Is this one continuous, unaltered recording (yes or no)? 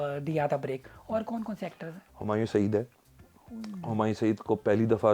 yes